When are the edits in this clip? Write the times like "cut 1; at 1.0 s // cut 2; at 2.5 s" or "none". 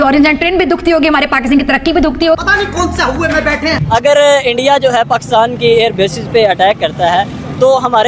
none